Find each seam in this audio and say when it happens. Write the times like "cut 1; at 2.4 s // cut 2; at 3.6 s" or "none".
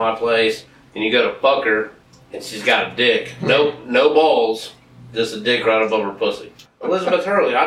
cut 1; at 6.6 s

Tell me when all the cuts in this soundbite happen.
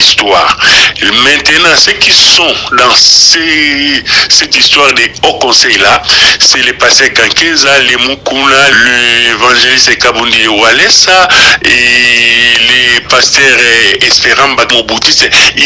cut 1; at 8.8 s // cut 2; at 14.7 s

